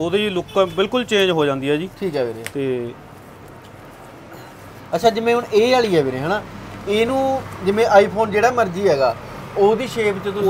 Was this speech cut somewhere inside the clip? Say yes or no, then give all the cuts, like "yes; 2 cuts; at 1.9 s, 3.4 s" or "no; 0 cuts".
no; 0 cuts